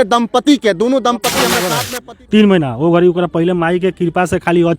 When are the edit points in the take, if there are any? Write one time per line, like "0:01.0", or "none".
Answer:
0:01.8